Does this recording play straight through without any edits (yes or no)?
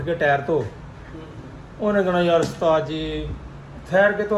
yes